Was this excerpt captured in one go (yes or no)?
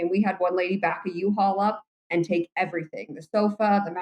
yes